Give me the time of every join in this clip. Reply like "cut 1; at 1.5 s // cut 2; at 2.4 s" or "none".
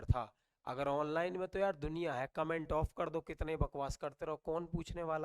none